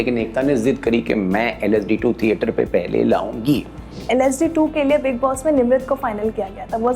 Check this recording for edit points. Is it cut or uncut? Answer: cut